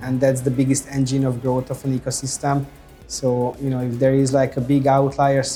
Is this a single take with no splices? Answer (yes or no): yes